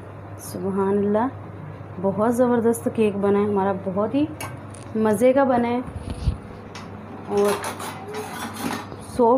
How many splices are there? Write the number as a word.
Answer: zero